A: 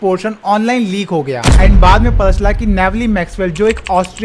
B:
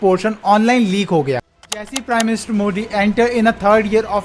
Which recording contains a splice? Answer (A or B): B